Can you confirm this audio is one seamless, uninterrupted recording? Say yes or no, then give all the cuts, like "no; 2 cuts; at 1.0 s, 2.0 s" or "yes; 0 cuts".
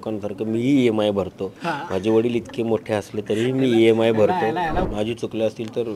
no; 1 cut; at 4.8 s